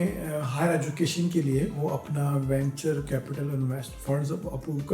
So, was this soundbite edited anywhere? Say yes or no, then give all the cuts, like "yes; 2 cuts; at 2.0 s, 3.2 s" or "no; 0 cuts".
yes; 1 cut; at 1.8 s